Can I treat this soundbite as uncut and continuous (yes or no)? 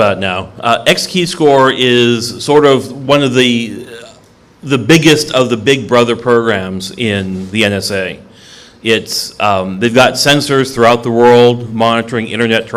yes